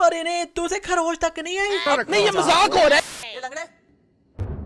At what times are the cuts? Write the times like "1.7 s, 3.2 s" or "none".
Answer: 1.9 s, 3.0 s

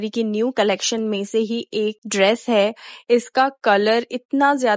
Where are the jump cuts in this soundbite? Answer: none

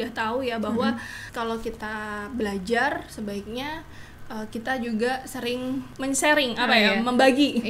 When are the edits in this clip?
1.2 s, 5.9 s

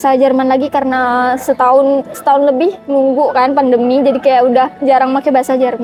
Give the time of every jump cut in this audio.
none

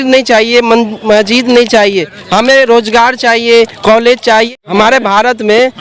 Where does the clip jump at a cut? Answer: 4.5 s

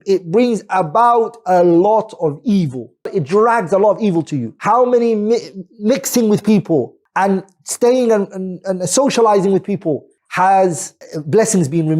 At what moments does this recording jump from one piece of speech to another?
3.1 s

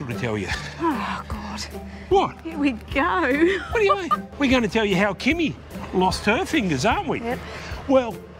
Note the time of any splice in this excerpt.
4.2 s

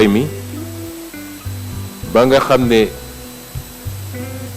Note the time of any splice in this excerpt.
3.1 s

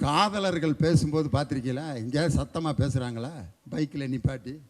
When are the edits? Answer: 3.5 s

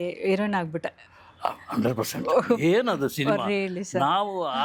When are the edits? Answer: none

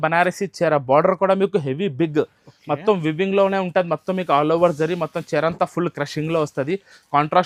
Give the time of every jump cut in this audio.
none

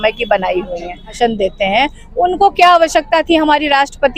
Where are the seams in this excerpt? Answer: 1.2 s

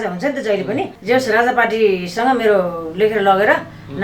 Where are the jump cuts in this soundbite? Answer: 0.9 s

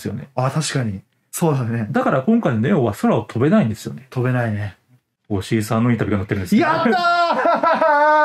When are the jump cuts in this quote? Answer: 1.3 s, 5.1 s

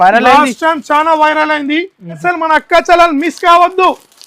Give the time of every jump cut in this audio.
2.2 s

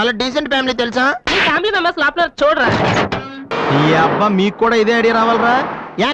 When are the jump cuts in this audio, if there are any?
3.5 s

